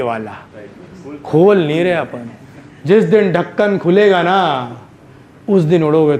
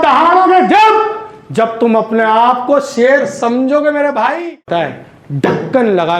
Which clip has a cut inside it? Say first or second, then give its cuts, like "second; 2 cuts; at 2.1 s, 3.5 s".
second; 1 cut; at 4.8 s